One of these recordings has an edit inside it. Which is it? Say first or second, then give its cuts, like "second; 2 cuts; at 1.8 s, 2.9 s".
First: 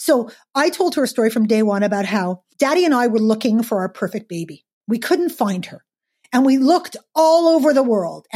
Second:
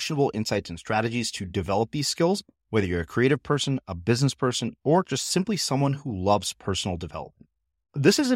first; 1 cut; at 2.4 s